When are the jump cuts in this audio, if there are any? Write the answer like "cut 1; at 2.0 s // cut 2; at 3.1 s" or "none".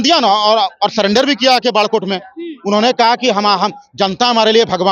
none